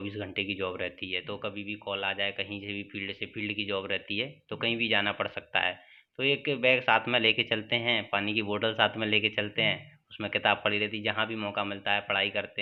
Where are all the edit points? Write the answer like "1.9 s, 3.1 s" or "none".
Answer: none

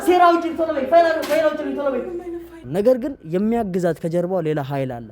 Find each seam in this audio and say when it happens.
2.5 s

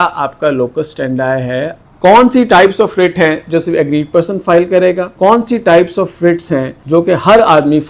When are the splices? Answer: 1.8 s, 5.1 s, 6.8 s

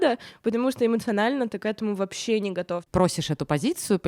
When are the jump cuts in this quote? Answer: 2.9 s

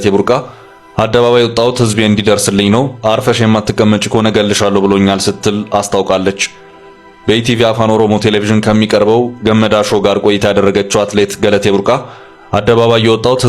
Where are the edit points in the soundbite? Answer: none

